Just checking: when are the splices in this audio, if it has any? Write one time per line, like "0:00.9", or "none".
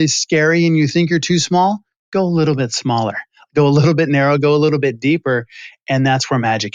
none